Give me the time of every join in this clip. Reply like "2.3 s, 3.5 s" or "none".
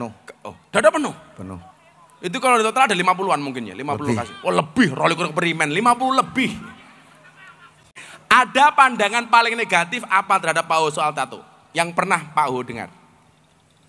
7.9 s